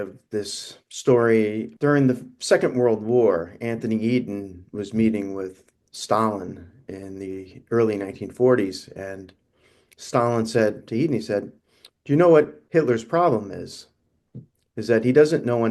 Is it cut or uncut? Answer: cut